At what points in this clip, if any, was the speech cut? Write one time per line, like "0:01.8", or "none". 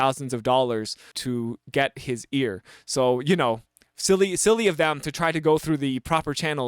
0:01.1

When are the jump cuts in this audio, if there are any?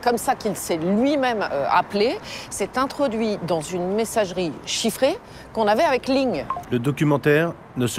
0:06.5

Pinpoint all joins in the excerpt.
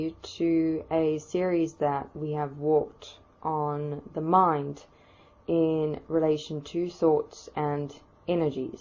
0:07.2

